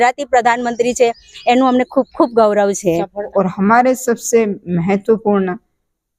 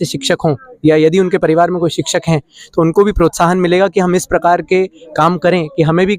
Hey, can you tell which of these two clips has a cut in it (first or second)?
first